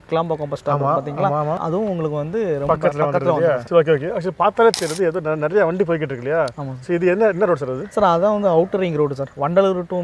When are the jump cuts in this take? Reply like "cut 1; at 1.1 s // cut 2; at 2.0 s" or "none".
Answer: none